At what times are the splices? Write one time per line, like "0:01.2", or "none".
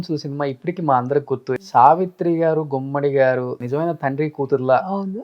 0:01.6